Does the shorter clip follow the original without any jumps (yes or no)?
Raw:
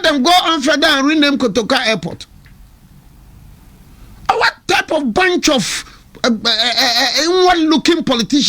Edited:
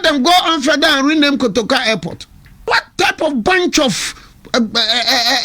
no